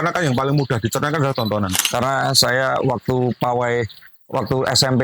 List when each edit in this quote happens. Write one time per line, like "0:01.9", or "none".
0:01.7

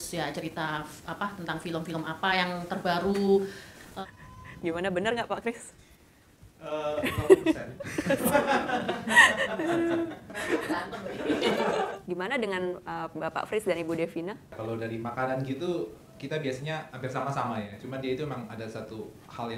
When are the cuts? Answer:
none

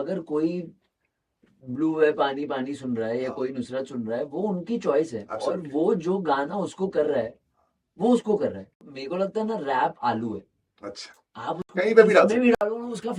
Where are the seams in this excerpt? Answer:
0:09.0

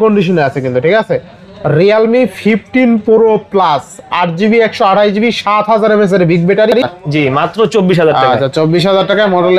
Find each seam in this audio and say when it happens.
0:07.0

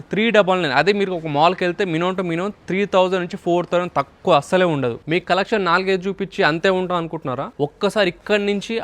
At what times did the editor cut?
0:05.0
0:07.5

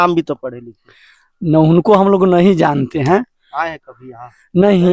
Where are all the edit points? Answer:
none

